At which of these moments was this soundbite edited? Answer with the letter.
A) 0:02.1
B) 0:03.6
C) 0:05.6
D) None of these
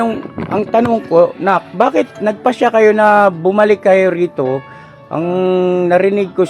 D